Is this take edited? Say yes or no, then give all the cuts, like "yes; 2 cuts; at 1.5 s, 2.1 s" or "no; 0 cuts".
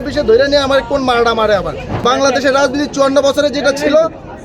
yes; 1 cut; at 2.0 s